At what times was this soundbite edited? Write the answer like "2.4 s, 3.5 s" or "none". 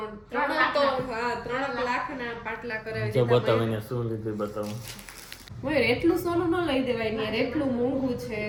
none